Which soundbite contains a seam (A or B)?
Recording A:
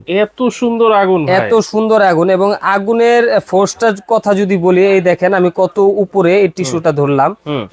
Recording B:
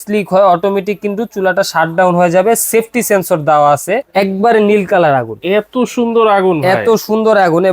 B